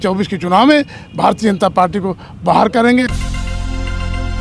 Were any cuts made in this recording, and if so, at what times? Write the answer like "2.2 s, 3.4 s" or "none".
3.1 s